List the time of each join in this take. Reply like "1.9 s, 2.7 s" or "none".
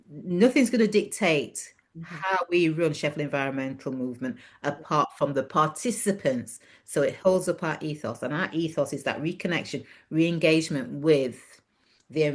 none